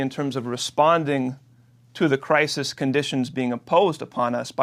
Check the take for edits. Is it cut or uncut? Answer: uncut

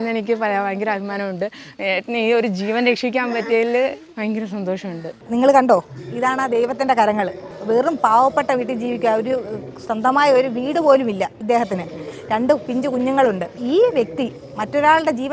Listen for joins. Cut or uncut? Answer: uncut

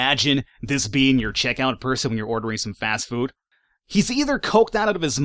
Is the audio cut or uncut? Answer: cut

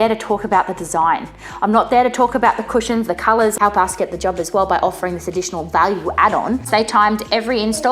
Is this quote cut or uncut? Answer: cut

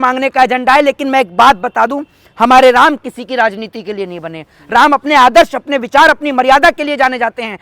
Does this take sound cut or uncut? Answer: uncut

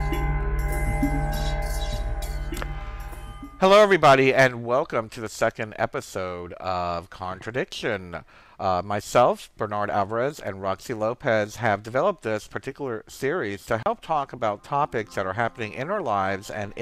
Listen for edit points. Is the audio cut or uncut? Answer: cut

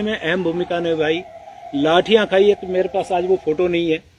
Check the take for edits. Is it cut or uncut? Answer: uncut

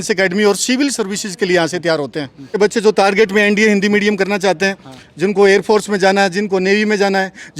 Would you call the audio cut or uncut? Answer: cut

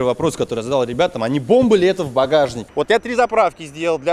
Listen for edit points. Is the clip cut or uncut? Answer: cut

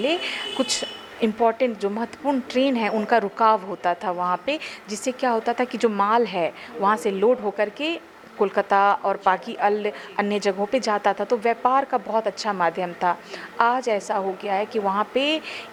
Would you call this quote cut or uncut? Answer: uncut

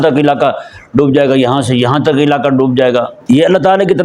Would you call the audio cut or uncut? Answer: cut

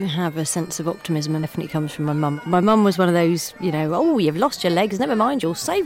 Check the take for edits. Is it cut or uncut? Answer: cut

